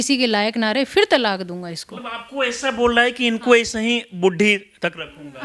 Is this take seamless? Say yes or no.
yes